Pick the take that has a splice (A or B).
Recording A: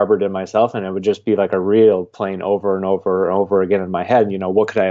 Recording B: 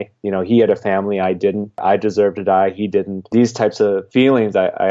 B